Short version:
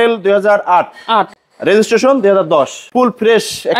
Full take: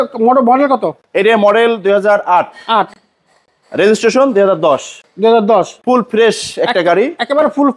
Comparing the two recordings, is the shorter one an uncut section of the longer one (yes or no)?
no